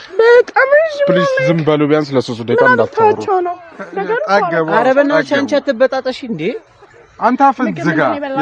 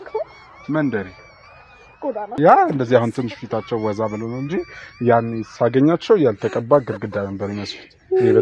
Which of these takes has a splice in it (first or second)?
second